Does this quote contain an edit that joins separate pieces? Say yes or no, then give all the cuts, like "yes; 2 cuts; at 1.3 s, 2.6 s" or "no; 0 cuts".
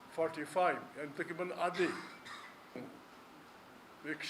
yes; 1 cut; at 2.8 s